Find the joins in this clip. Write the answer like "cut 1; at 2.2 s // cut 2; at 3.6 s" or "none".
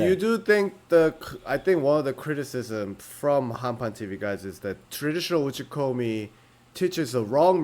cut 1; at 4.9 s